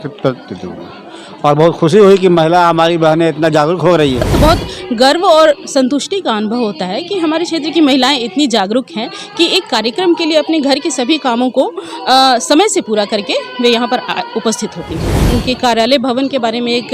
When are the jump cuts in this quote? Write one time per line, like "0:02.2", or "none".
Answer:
0:04.2
0:15.2